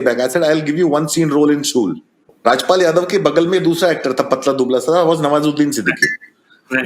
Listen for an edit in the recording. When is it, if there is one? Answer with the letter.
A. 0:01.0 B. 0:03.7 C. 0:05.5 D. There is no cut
D